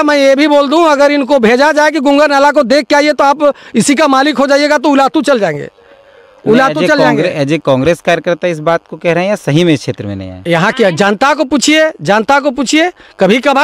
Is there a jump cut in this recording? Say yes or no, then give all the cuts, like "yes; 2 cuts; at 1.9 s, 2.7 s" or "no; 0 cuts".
no; 0 cuts